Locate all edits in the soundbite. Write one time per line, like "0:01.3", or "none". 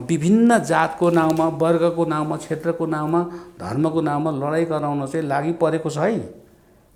none